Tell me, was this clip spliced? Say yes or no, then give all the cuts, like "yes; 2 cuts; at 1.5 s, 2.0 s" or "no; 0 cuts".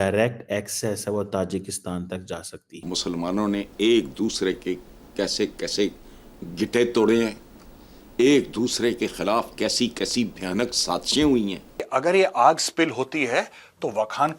yes; 2 cuts; at 2.8 s, 11.8 s